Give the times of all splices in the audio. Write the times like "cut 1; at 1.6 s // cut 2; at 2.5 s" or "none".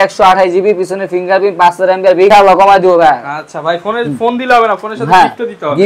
cut 1; at 2.3 s